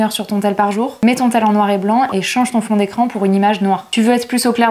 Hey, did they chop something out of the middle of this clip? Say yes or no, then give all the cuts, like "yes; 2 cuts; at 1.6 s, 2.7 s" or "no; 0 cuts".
no; 0 cuts